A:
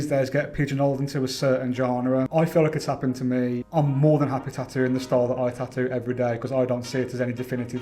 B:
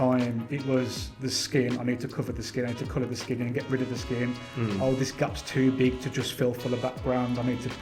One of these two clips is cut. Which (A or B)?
A